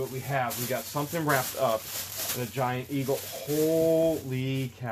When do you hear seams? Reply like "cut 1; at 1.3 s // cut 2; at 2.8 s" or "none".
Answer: none